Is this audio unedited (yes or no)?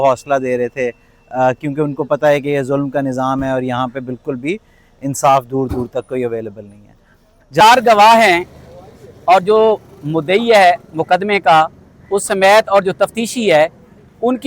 no